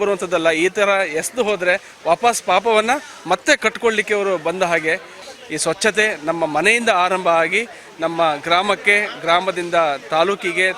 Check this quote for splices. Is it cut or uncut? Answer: cut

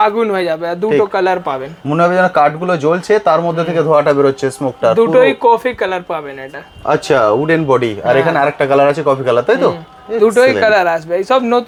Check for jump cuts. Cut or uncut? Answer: uncut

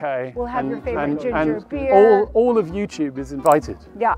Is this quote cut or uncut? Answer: uncut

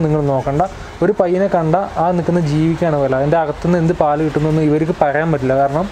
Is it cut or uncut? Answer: uncut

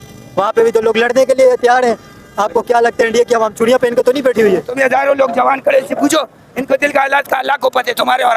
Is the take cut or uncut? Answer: cut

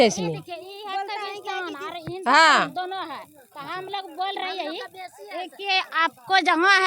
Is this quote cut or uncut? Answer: uncut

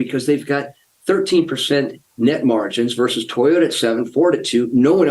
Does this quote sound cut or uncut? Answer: cut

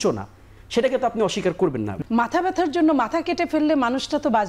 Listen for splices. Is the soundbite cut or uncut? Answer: cut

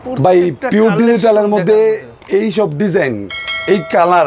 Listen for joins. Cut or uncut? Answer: uncut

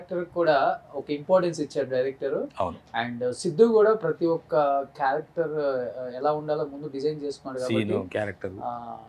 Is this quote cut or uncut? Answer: uncut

